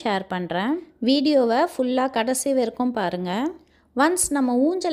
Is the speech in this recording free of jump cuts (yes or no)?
yes